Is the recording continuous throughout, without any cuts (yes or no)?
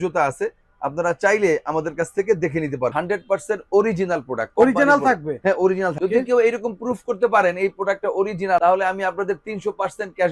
no